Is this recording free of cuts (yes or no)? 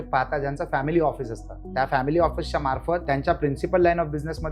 no